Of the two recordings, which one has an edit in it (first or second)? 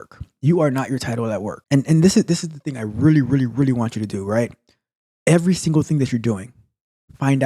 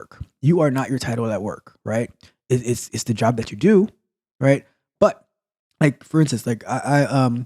first